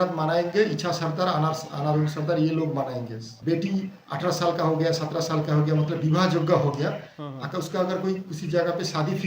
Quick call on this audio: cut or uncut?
cut